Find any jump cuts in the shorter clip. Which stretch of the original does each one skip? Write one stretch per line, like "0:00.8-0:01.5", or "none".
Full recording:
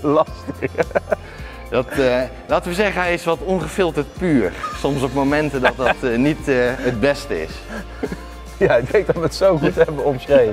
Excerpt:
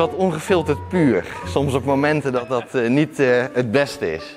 none